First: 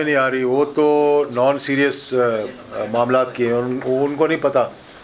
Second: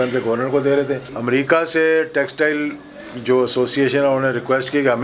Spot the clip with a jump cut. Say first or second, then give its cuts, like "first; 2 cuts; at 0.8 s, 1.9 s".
second; 1 cut; at 1.1 s